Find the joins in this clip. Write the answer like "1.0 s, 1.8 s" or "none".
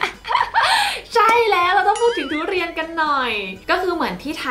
3.5 s